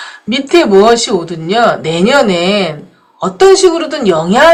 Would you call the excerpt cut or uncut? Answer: uncut